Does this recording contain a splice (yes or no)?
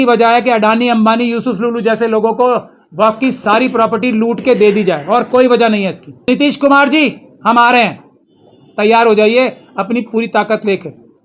yes